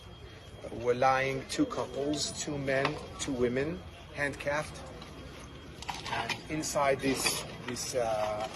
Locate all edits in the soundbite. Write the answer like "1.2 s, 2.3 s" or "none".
none